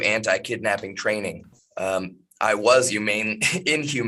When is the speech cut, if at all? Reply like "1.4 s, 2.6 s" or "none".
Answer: none